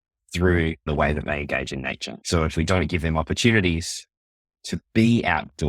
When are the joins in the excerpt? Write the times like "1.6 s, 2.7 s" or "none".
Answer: 0.9 s, 2.1 s